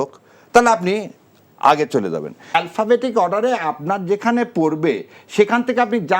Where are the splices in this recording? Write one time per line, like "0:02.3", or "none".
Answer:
0:02.5